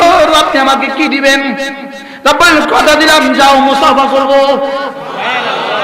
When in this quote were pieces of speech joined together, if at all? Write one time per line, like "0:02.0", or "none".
none